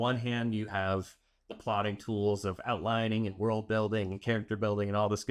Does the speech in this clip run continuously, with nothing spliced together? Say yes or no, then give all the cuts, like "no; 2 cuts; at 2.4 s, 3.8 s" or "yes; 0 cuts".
yes; 0 cuts